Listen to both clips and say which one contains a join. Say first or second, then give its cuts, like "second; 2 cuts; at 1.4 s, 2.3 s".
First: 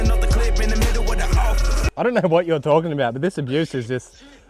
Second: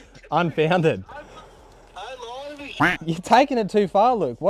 first; 1 cut; at 1.9 s